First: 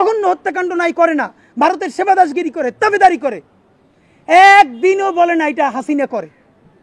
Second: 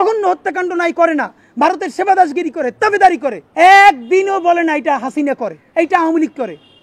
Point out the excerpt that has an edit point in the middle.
second; 2 cuts; at 3.4 s, 5.6 s

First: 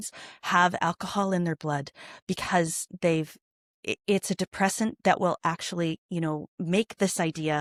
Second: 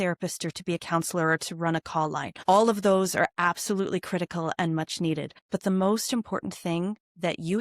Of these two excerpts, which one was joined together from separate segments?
second; 2 cuts; at 2.3 s, 5.3 s

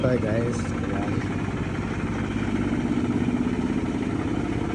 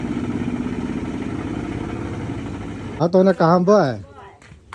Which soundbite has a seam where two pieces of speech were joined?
second; 1 cut; at 3.0 s

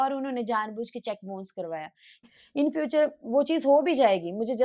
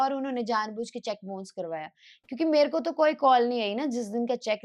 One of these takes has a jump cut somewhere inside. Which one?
first; 1 cut; at 2.3 s

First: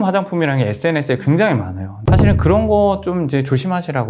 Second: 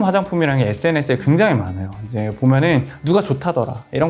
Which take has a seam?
first; 1 cut; at 2.0 s

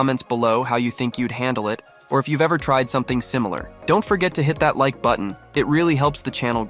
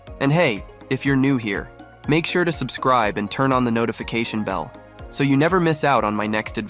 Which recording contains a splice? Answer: first; 2 cuts; at 3.7 s, 5.4 s

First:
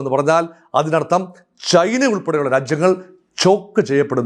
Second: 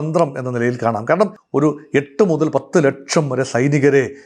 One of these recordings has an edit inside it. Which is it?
second; 1 cut; at 1.4 s

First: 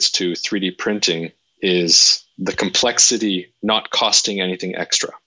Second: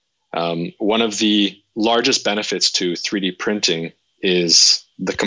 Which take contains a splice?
second; 1 cut; at 1.6 s

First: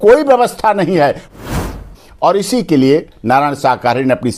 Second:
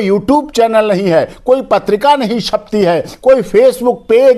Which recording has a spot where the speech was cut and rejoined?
first; 1 cut; at 1.4 s

